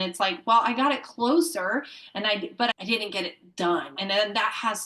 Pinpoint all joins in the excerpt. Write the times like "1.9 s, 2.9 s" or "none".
2.7 s, 4.0 s